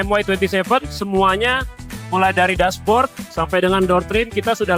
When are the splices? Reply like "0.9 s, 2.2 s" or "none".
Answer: none